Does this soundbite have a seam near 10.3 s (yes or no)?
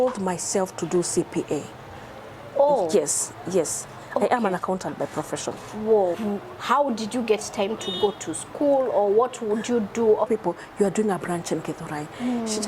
yes